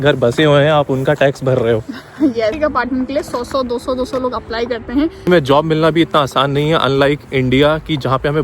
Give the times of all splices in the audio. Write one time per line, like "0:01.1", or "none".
0:02.6
0:05.3